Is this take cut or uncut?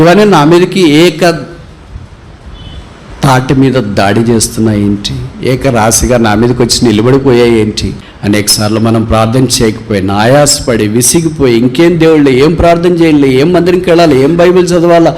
cut